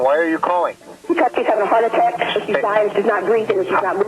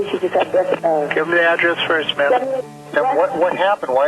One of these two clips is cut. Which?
second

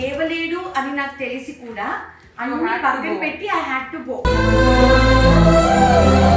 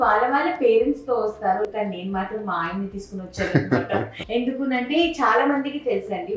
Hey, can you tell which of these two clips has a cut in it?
second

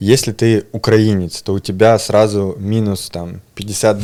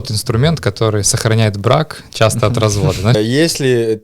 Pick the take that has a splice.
second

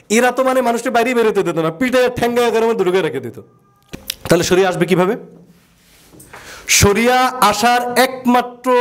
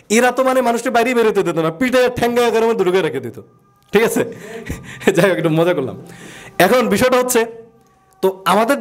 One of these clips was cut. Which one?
first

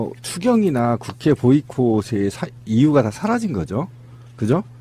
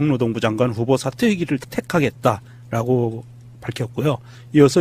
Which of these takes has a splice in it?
second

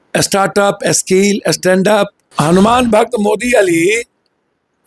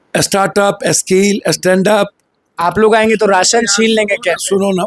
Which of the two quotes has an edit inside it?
first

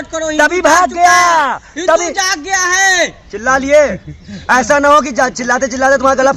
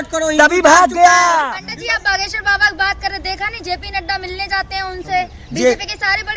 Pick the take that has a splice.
second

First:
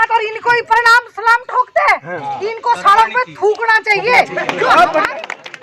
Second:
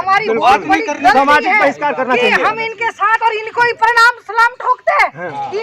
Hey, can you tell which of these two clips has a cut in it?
second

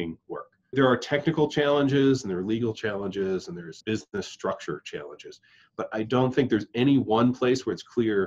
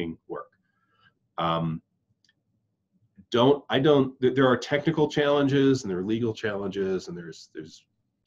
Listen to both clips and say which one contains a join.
first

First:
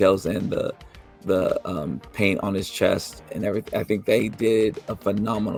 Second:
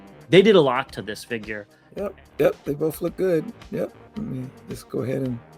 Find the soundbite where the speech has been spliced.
second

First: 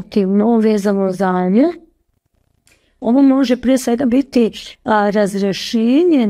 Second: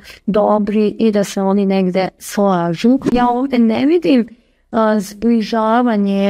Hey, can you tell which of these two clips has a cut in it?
second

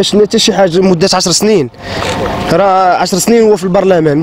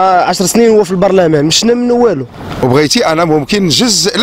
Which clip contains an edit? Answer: second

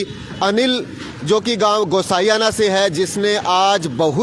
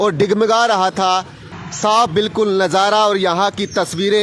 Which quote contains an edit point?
second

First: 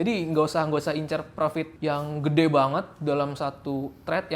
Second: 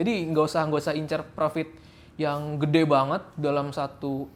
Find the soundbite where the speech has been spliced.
first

